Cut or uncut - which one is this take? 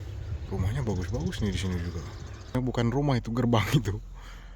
cut